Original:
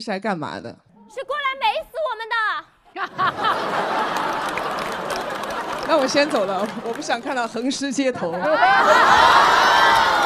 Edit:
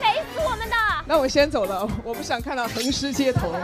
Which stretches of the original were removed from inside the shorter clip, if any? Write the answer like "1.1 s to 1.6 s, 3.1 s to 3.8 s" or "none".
2.6 s to 5.8 s